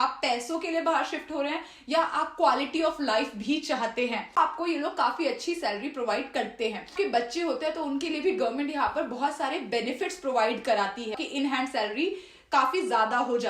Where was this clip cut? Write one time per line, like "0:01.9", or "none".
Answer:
0:04.4
0:06.9
0:11.1